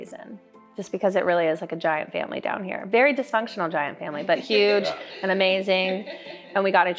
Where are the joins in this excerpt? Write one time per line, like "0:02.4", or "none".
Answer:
none